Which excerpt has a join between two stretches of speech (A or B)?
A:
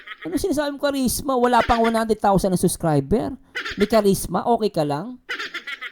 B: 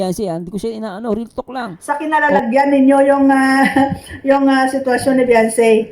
B